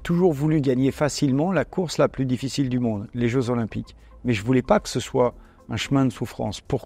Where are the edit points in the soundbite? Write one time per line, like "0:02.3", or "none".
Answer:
none